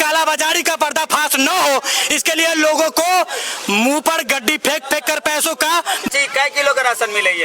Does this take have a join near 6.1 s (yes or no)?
yes